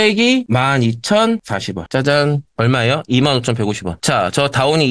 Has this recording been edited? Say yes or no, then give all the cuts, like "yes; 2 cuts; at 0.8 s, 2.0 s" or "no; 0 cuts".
no; 0 cuts